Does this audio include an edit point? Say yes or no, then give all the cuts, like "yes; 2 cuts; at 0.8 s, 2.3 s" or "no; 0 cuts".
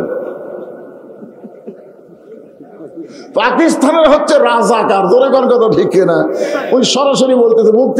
no; 0 cuts